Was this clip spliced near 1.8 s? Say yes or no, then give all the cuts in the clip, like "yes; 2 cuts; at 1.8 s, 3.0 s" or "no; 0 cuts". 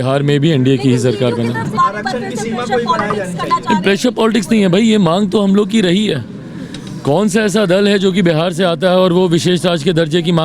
yes; 1 cut; at 1.8 s